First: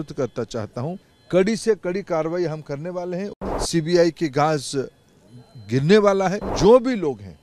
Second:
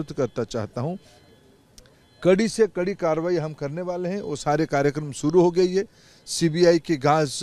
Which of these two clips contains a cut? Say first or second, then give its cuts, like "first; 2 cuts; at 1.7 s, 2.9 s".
first; 3 cuts; at 1.1 s, 3.3 s, 6.4 s